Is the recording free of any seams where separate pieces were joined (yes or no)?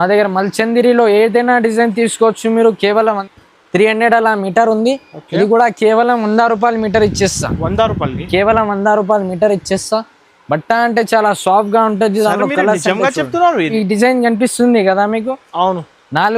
no